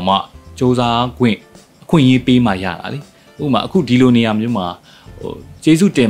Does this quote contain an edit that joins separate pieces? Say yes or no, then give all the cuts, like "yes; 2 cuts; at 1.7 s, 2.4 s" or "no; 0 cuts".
no; 0 cuts